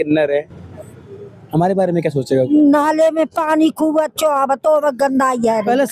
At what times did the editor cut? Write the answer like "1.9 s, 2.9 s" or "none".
2.5 s